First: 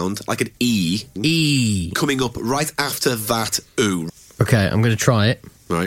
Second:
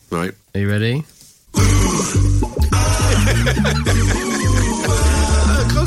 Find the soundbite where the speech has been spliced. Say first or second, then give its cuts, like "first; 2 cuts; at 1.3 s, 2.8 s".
first; 2 cuts; at 1.1 s, 4.0 s